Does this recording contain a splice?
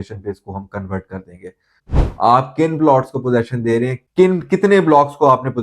yes; 1 cut; at 1.7 s

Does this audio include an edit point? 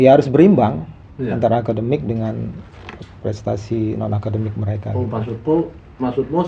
no; 0 cuts

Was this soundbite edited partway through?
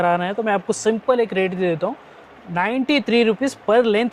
no; 0 cuts

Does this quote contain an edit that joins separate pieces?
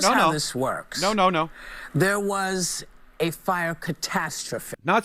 no; 0 cuts

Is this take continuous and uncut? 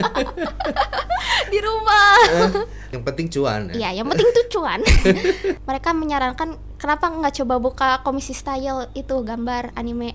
no; 2 cuts; at 2.8 s, 5.6 s

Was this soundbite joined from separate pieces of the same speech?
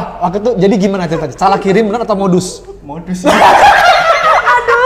no; 0 cuts

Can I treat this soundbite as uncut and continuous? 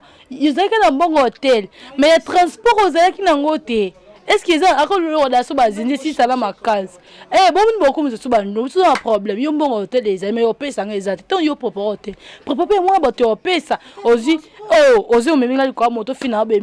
yes; 0 cuts

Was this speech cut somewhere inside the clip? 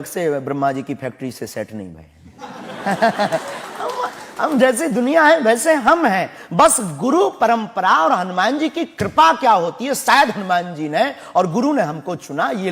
no; 0 cuts

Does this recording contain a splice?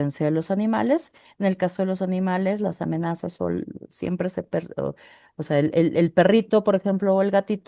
no; 0 cuts

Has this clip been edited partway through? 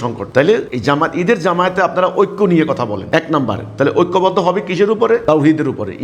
no; 0 cuts

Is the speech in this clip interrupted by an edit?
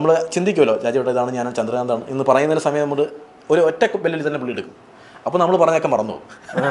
no; 0 cuts

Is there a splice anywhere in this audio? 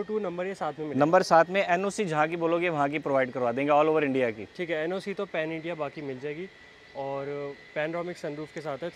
no; 0 cuts

